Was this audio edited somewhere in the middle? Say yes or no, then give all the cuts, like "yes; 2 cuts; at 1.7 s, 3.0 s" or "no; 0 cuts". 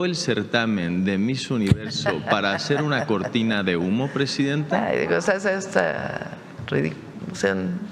no; 0 cuts